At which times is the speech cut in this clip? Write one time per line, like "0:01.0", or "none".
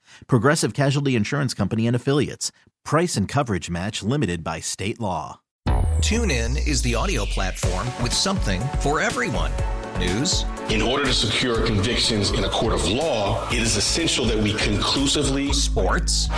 0:05.4